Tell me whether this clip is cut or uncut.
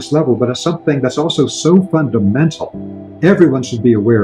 uncut